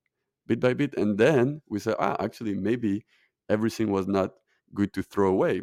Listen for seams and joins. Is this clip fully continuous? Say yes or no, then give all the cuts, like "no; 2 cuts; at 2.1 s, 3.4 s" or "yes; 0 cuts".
yes; 0 cuts